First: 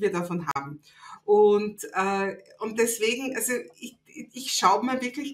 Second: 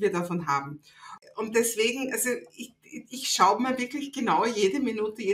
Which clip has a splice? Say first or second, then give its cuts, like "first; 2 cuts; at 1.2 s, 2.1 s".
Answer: second; 1 cut; at 1.1 s